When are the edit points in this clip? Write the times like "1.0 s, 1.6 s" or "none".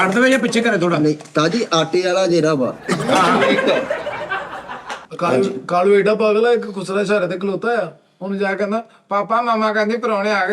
5.0 s